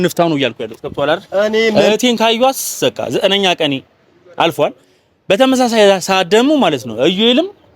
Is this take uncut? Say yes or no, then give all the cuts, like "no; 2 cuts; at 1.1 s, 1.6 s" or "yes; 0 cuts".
no; 1 cut; at 1.7 s